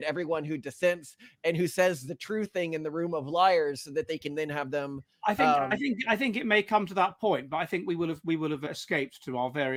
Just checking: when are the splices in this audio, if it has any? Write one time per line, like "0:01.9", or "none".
none